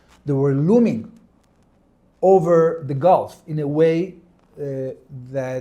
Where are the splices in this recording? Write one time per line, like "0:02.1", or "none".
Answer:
none